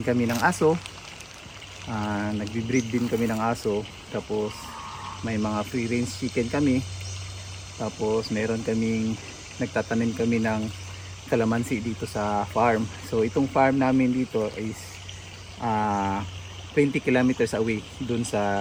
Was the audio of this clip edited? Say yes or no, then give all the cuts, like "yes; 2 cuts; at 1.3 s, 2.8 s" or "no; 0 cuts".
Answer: no; 0 cuts